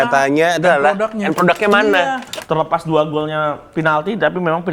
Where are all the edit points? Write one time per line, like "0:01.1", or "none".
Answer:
0:02.2